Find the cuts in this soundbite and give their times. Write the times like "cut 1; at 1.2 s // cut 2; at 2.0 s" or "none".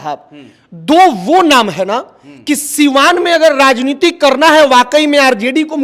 none